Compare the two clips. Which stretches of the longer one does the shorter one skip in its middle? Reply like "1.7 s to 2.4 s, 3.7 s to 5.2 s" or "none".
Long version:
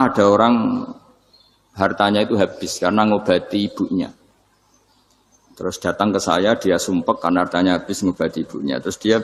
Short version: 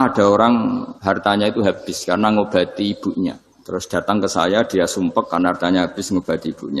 0.9 s to 1.7 s, 4.3 s to 5.4 s